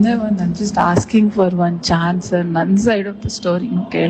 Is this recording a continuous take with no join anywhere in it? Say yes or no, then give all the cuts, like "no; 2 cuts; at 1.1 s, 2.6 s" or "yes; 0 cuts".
yes; 0 cuts